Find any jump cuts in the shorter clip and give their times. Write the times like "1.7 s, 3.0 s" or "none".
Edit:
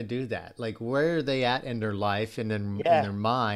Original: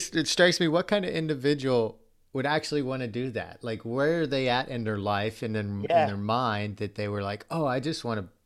none